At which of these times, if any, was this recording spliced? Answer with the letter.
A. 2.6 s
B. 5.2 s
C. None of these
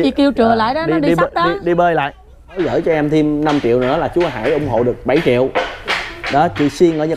A